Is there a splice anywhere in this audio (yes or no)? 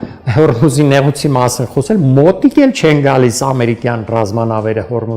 no